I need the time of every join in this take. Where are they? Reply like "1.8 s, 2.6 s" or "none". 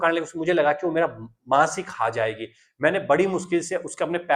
none